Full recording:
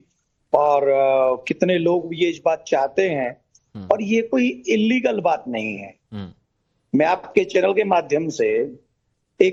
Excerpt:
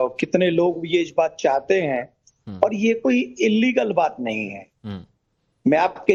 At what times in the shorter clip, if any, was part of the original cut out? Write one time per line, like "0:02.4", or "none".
none